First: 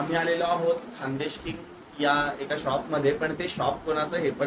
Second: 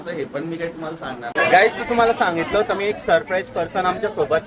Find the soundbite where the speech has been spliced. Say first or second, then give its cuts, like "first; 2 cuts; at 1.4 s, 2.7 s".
second; 1 cut; at 1.3 s